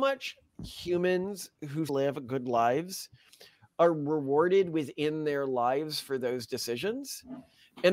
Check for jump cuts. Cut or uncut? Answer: cut